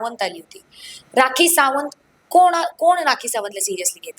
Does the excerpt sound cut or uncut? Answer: uncut